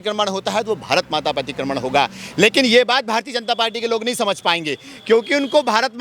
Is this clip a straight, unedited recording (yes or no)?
yes